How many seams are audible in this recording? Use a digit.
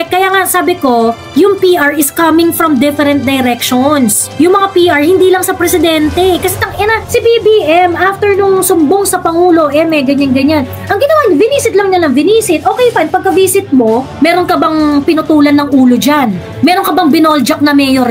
0